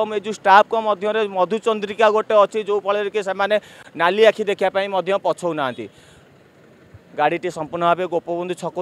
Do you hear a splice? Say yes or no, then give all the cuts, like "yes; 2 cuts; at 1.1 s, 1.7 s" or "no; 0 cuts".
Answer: no; 0 cuts